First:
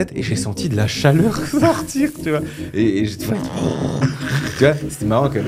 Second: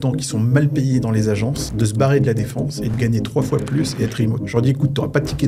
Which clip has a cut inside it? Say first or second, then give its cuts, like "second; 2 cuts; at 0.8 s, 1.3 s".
second; 3 cuts; at 1.6 s, 2.9 s, 4.4 s